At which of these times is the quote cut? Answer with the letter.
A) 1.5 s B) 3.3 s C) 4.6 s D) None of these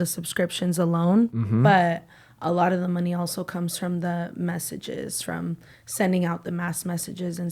A